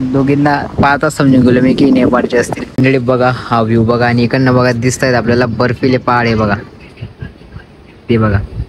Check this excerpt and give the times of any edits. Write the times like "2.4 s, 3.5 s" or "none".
2.6 s